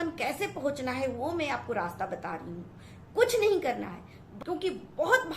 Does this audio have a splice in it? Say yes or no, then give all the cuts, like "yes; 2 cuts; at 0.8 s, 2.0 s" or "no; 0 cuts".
yes; 1 cut; at 4.2 s